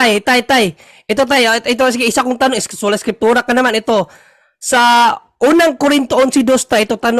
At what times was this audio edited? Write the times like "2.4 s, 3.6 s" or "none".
none